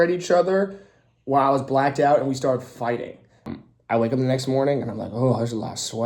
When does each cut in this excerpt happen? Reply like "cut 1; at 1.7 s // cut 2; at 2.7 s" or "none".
cut 1; at 3.5 s